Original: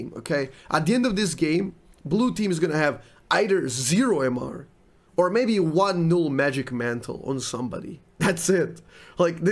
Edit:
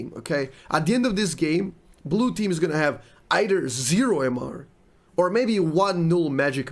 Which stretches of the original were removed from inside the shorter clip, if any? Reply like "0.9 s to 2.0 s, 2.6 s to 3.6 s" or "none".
none